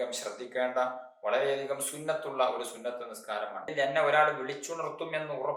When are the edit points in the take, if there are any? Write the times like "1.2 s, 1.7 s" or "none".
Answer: 3.7 s

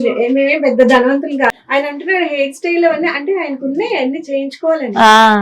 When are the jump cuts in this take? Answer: 1.6 s

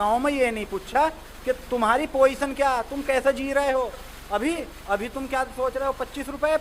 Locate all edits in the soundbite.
4.1 s

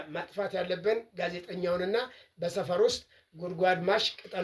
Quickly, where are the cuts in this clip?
none

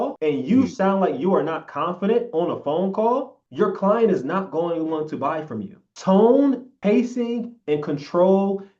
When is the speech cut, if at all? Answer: 6.7 s

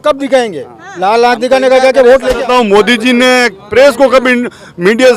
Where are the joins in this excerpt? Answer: 2.3 s

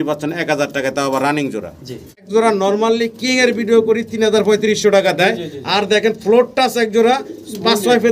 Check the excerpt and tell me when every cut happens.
2.2 s

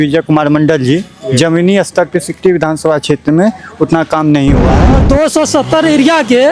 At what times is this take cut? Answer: 4.9 s

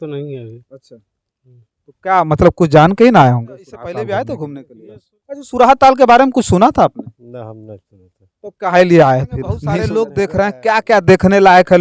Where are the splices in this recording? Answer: 3.7 s, 9.7 s

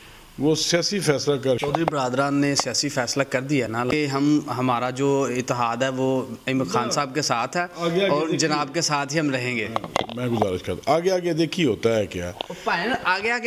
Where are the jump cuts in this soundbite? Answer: 1.6 s, 3.8 s

